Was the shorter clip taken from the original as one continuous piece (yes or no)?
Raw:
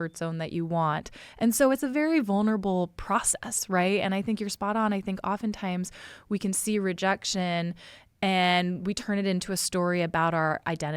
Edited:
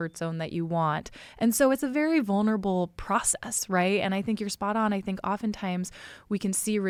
yes